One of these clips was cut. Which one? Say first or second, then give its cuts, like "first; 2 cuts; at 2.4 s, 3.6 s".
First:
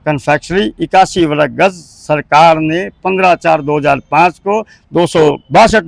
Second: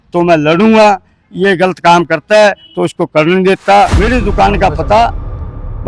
second; 1 cut; at 3.9 s